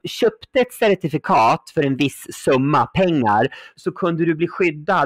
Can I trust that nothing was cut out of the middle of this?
no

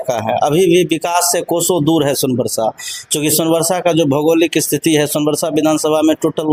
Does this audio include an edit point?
no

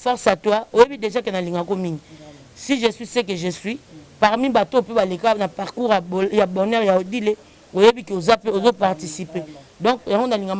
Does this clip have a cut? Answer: no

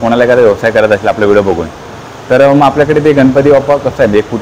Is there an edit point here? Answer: no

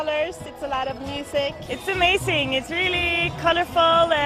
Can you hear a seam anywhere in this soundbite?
yes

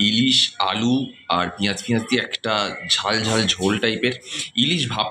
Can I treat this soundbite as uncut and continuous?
yes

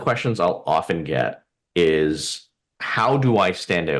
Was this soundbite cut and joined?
no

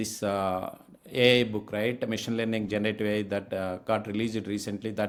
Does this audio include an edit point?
no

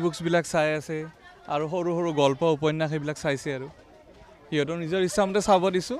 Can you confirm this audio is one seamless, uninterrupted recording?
yes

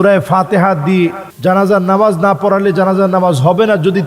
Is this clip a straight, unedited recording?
no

